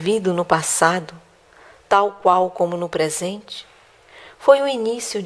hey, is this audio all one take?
no; 1 cut; at 2.5 s

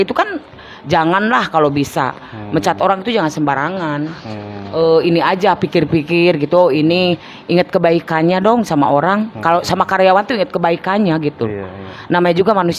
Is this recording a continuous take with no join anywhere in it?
yes; 0 cuts

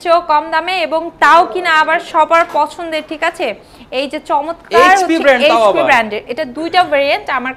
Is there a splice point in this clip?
no; 0 cuts

